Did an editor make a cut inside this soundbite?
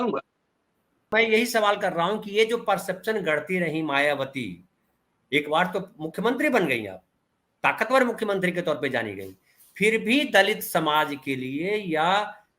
yes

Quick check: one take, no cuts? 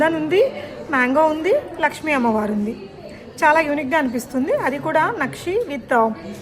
yes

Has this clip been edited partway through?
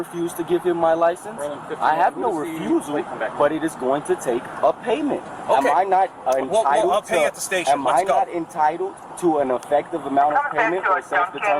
no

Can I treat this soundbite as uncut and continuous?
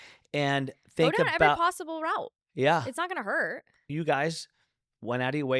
no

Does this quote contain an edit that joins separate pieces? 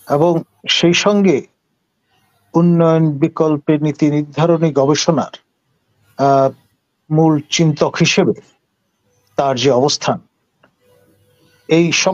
no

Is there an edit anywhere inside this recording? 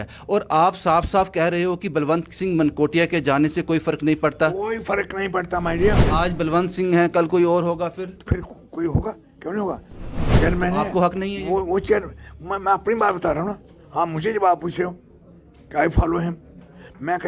yes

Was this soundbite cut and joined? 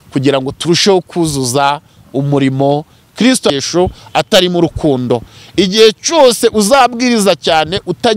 yes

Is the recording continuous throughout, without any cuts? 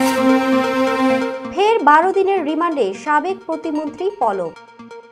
no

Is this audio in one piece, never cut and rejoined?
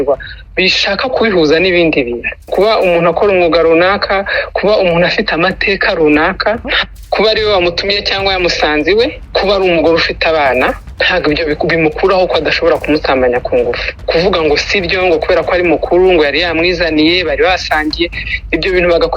no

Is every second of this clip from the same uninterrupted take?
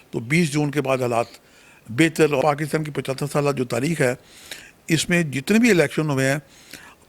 no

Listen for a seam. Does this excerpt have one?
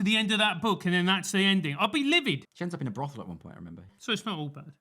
yes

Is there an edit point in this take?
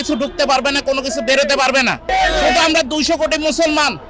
yes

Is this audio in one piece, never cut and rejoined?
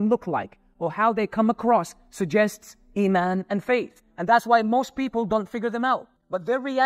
yes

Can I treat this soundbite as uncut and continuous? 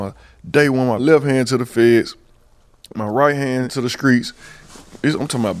no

